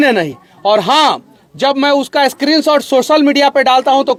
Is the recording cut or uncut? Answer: uncut